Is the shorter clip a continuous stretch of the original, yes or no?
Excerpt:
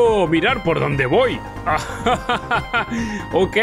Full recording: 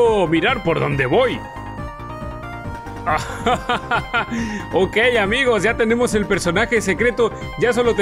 no